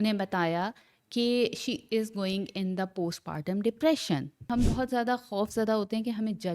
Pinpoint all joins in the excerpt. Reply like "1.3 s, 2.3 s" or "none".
4.5 s